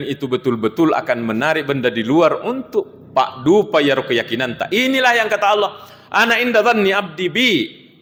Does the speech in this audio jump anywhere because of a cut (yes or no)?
no